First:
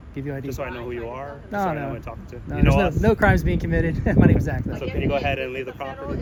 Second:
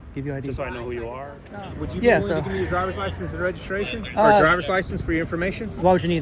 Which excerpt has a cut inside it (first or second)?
second